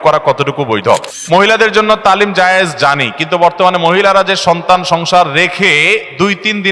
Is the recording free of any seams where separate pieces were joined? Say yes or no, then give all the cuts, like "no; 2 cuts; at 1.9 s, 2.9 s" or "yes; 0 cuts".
no; 1 cut; at 1.1 s